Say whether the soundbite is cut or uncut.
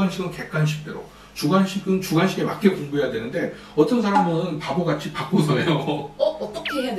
uncut